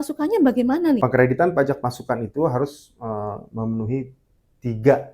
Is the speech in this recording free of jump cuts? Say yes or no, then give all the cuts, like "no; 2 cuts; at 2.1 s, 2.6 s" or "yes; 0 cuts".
no; 1 cut; at 1.0 s